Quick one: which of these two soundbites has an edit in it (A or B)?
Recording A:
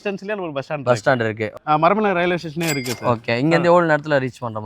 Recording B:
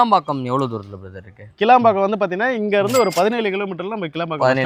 A